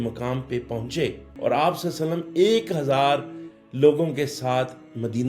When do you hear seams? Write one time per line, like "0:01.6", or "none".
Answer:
0:01.3